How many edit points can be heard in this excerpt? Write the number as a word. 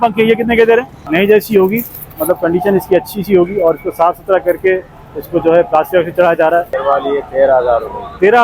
two